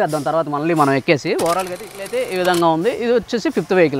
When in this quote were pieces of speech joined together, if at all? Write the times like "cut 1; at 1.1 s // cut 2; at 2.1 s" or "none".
cut 1; at 1.9 s